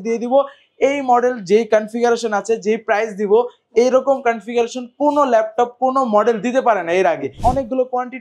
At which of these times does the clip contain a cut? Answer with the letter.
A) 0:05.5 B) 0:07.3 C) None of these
B